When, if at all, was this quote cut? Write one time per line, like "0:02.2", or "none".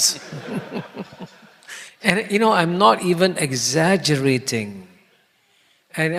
none